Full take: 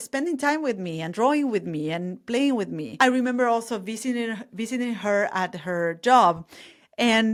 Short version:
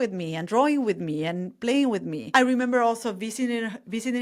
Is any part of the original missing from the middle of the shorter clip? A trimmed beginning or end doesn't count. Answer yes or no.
no